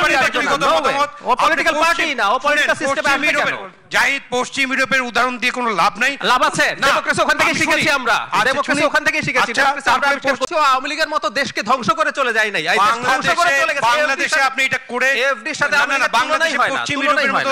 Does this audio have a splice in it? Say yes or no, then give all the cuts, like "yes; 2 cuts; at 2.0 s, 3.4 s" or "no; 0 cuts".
yes; 1 cut; at 10.5 s